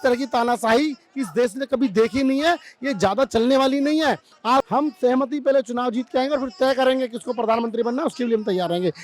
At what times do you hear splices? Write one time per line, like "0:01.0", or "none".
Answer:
0:04.7